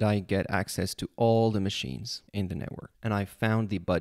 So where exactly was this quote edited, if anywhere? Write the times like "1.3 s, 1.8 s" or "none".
2.3 s